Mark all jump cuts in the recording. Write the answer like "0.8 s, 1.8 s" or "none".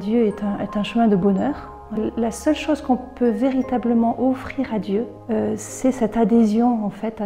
2.0 s, 5.2 s